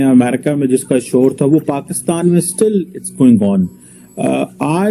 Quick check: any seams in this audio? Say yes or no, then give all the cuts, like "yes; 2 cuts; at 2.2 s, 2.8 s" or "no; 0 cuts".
no; 0 cuts